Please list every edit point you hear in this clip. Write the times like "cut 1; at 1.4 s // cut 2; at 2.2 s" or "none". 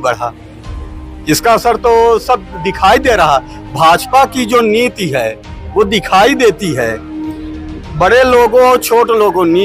none

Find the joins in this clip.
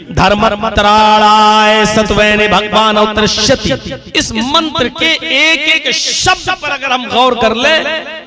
cut 1; at 4.0 s

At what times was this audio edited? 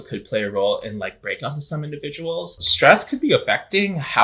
cut 1; at 2.5 s

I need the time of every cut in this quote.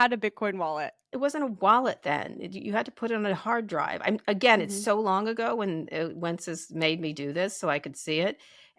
cut 1; at 1.1 s

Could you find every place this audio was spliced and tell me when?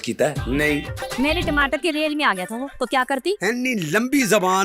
cut 1; at 1.0 s

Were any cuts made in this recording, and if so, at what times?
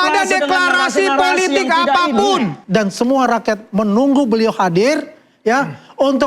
cut 1; at 2.6 s

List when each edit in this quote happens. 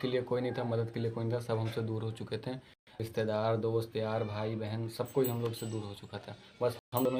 none

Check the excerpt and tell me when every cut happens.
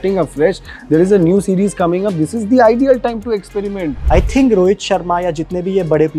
cut 1; at 3.9 s

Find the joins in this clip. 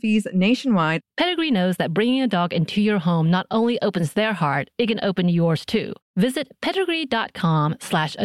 cut 1; at 1.0 s

